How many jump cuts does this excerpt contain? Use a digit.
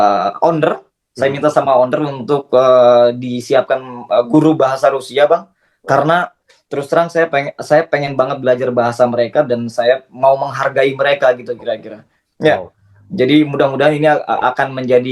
0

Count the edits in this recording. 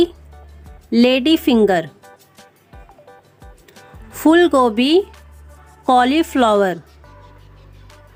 0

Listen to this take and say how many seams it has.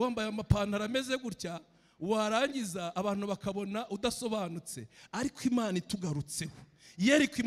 0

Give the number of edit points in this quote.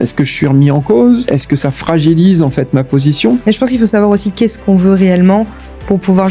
2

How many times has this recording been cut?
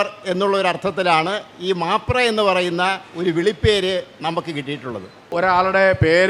1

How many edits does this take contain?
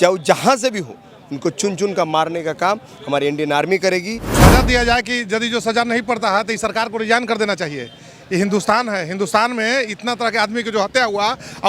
1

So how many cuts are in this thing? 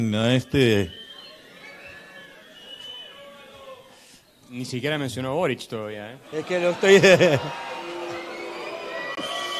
0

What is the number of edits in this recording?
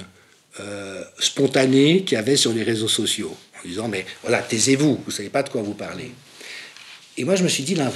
0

